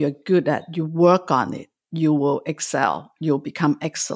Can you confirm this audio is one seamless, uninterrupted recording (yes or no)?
yes